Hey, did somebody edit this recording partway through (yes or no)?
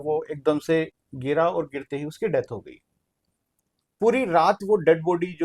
yes